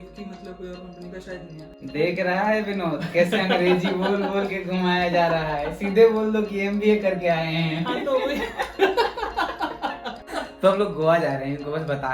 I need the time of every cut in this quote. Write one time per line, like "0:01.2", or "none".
0:01.7
0:10.3